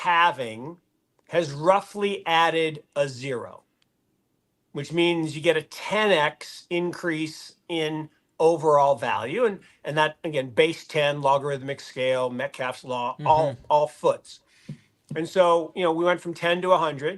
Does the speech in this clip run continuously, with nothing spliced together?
yes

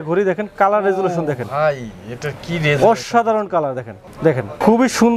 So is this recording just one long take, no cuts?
yes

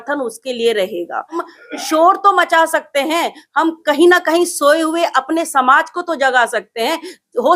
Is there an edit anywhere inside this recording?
yes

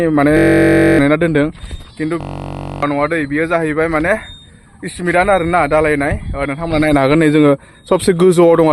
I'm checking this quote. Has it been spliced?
no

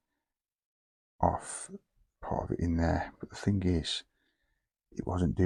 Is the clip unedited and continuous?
yes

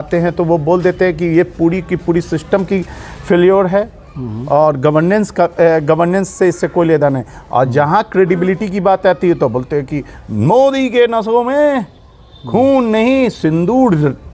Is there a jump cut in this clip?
no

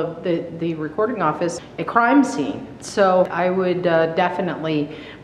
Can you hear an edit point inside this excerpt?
yes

